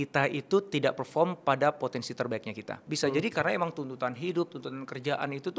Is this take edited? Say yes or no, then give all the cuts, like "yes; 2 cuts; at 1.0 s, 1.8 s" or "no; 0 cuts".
yes; 1 cut; at 2.8 s